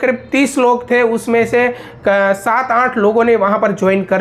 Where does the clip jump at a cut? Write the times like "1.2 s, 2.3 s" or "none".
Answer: none